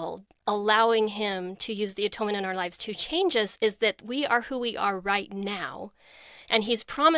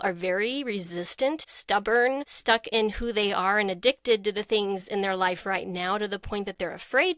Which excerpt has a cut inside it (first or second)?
second